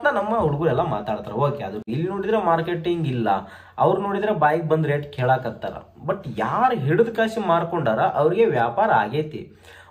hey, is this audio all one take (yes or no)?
no